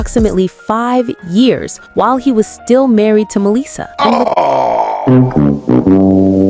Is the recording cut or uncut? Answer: uncut